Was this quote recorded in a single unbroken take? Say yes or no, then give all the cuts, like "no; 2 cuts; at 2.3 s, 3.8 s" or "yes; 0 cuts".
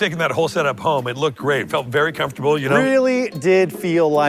no; 1 cut; at 2.8 s